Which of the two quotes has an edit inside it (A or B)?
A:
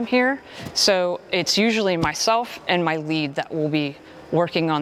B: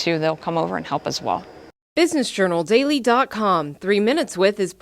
B